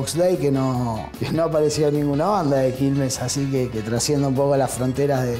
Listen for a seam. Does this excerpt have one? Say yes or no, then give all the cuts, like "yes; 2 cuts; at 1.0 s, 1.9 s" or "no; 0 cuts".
yes; 1 cut; at 1.1 s